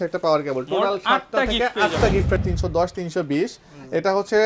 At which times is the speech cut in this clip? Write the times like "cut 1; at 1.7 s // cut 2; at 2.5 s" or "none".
cut 1; at 2.4 s

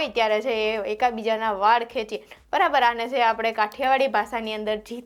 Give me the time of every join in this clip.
none

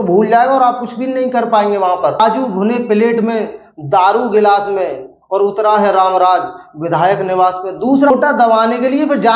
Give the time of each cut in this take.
cut 1; at 2.2 s // cut 2; at 8.1 s

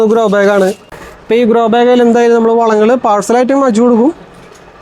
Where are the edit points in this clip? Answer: none

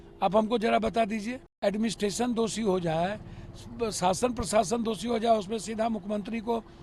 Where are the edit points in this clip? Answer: cut 1; at 1.4 s

